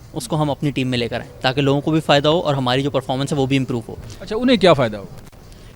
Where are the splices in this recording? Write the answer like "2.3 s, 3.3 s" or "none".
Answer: none